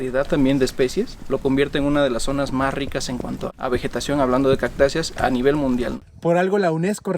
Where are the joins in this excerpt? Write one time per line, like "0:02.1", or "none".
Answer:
0:01.2
0:03.5
0:06.0